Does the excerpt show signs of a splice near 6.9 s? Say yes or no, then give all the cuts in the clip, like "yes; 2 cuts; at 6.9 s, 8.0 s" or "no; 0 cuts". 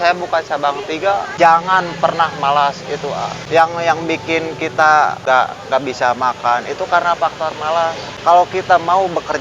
no; 4 cuts; at 1.3 s, 3.4 s, 5.2 s, 8.1 s